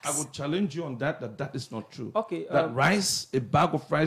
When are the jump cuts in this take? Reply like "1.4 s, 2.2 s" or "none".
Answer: none